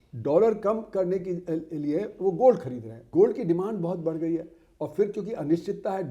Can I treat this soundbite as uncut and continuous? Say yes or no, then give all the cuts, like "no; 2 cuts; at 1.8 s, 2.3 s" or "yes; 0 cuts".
no; 1 cut; at 3.0 s